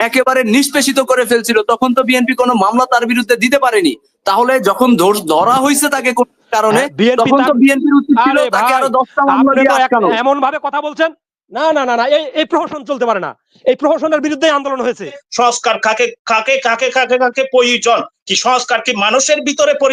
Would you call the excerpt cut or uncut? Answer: cut